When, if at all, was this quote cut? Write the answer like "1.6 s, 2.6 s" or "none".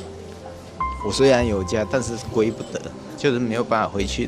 none